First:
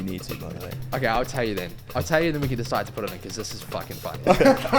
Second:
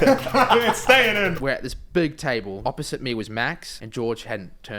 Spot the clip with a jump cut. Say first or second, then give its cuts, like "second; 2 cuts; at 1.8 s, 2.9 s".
second; 3 cuts; at 1.3 s, 2.6 s, 3.7 s